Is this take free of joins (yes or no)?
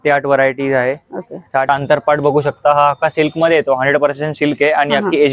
no